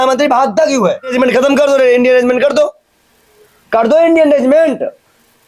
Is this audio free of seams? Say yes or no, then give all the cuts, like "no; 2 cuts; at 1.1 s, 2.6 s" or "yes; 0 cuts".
no; 1 cut; at 1.1 s